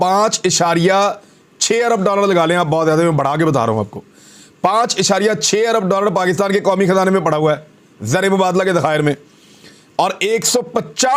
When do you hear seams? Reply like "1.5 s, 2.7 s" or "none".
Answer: none